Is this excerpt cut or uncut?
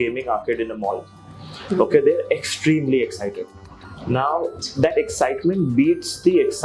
uncut